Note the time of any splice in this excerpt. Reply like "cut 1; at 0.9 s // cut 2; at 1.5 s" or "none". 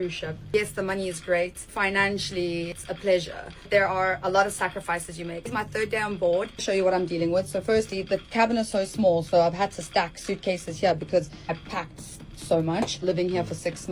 none

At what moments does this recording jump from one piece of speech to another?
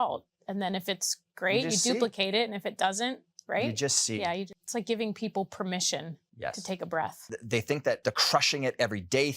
cut 1; at 4.5 s // cut 2; at 6.2 s // cut 3; at 7.3 s // cut 4; at 8.0 s

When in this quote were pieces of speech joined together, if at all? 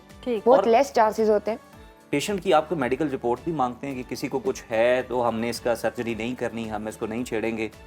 none

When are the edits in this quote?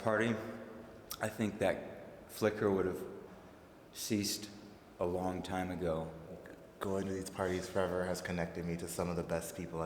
cut 1; at 3.3 s // cut 2; at 6.3 s

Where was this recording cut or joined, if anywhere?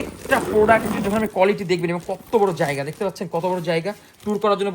none

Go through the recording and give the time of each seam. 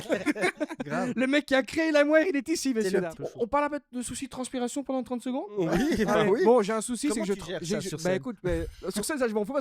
cut 1; at 3.1 s

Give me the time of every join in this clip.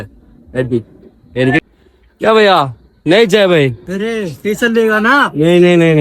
cut 1; at 1.6 s

